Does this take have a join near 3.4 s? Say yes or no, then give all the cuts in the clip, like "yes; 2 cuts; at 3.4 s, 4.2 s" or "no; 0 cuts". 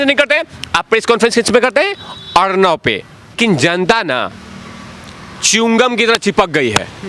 yes; 1 cut; at 3.4 s